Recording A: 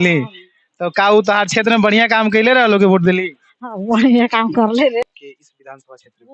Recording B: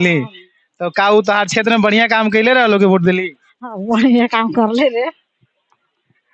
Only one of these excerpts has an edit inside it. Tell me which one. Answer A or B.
A